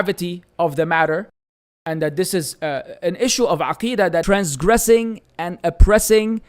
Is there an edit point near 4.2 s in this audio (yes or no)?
yes